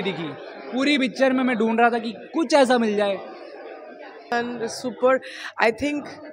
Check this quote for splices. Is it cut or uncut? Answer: cut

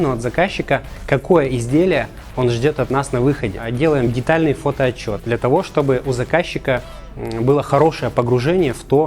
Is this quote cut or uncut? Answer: cut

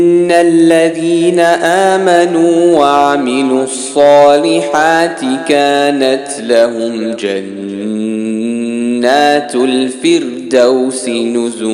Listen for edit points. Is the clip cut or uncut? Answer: uncut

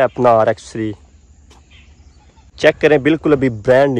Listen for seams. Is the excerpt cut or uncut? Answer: cut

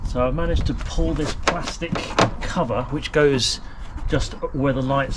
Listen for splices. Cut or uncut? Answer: uncut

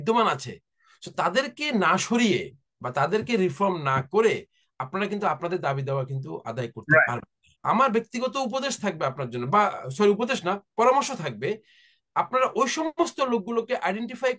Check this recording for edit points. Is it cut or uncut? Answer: cut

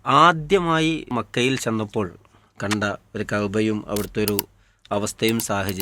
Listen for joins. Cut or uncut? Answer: cut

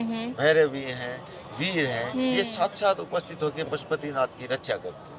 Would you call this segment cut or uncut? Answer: uncut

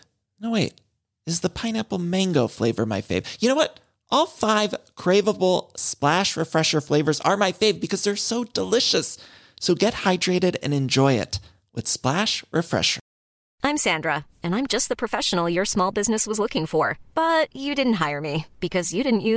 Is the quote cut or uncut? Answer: cut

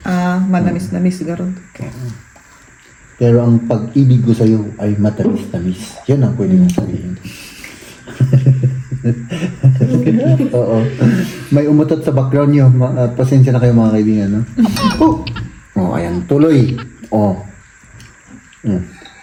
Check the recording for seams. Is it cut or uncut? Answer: uncut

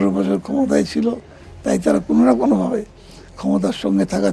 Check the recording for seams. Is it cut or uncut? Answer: uncut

